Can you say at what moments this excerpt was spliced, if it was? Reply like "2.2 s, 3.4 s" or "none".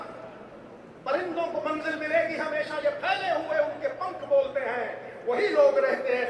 none